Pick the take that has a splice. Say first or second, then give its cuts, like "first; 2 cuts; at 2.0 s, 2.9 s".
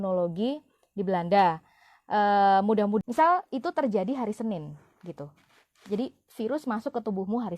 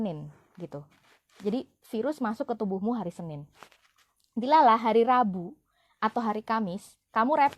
first; 1 cut; at 3.0 s